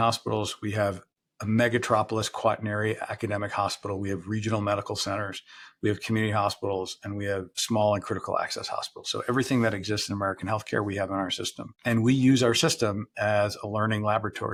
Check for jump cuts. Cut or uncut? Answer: uncut